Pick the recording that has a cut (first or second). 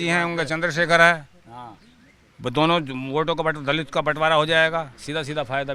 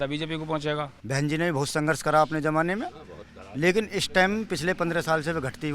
second